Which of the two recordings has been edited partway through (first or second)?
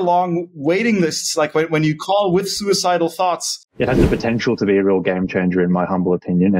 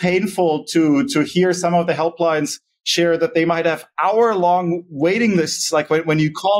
first